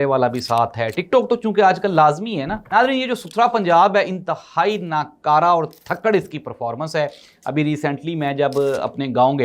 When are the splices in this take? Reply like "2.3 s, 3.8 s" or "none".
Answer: 2.5 s